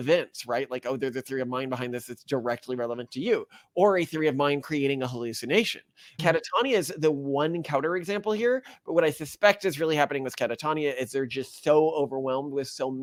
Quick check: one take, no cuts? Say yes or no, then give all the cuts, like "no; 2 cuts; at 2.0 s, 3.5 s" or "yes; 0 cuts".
yes; 0 cuts